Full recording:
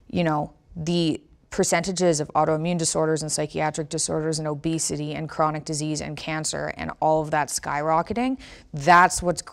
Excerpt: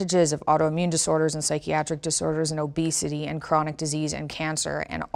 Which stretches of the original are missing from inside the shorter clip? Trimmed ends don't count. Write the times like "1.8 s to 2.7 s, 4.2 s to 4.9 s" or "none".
none